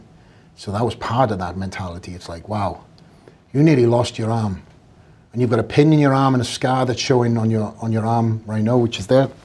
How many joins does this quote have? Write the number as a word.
zero